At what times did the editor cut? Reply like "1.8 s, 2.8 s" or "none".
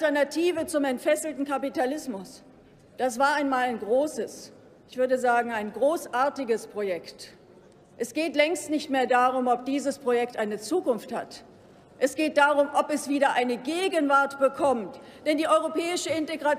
5.8 s